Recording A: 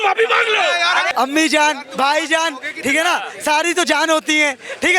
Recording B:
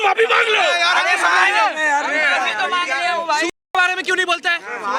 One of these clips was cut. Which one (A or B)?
A